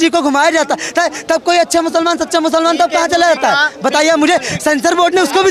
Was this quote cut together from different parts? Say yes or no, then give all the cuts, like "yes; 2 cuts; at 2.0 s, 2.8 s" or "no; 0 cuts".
no; 0 cuts